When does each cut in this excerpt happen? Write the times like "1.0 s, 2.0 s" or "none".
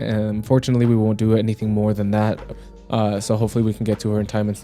2.6 s